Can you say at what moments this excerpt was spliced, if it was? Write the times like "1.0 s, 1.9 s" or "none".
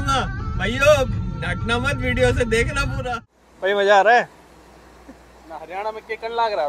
3.0 s